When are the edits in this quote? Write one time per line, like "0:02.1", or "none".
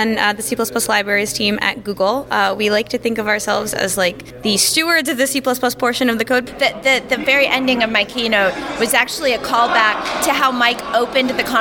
0:04.3
0:06.5